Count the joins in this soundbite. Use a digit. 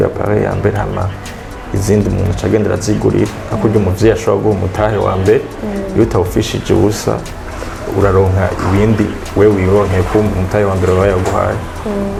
0